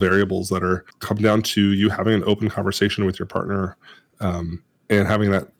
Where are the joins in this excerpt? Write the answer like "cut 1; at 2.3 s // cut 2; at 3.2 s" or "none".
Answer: cut 1; at 0.9 s